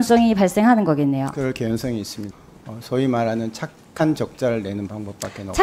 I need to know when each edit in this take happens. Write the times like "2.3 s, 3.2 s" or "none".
2.3 s